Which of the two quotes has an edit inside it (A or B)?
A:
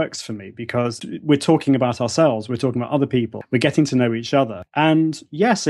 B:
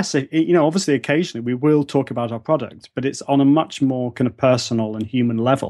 A